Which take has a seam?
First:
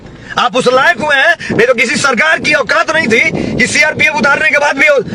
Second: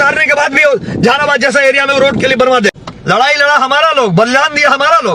second; 1 cut; at 2.8 s

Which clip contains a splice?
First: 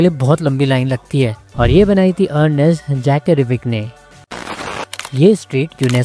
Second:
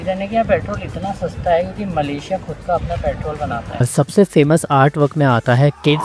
second; 1 cut; at 3.9 s

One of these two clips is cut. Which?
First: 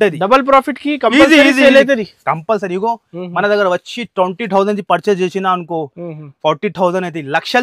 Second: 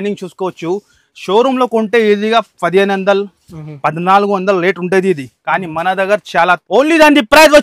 second; 1 cut; at 6.6 s

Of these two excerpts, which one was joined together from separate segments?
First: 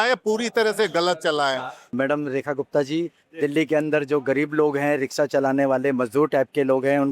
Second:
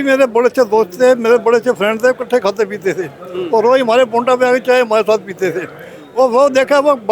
first; 1 cut; at 1.7 s

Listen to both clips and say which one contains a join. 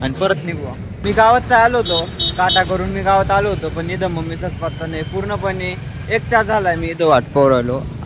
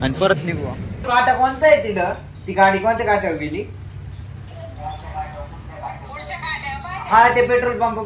second; 1 cut; at 1.0 s

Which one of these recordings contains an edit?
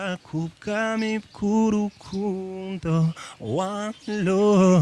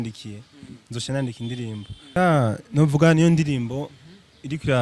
second; 1 cut; at 2.2 s

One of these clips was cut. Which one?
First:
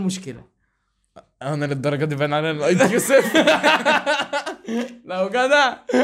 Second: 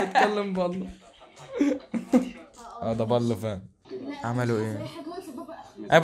second; 1 cut; at 3.9 s

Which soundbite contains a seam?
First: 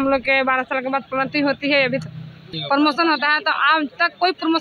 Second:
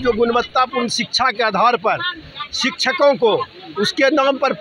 first; 1 cut; at 2.5 s

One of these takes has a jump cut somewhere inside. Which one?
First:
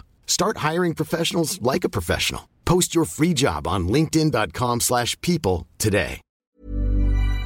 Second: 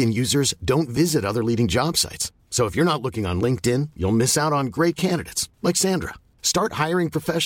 first; 1 cut; at 6.4 s

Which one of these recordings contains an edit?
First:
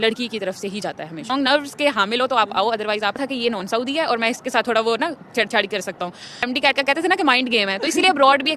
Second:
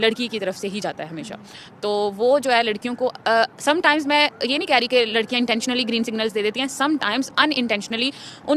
first; 3 cuts; at 1.3 s, 3.2 s, 6.4 s

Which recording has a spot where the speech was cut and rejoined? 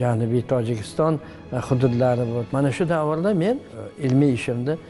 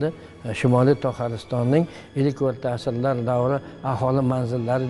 first; 2 cuts; at 2.5 s, 3.7 s

